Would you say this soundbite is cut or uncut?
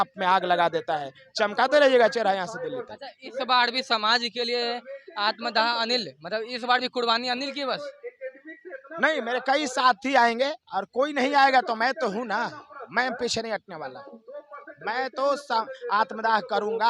uncut